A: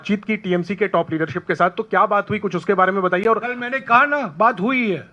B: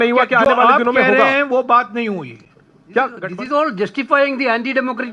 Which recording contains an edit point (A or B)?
B